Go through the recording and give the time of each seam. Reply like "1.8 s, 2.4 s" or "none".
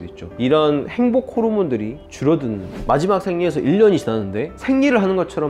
2.8 s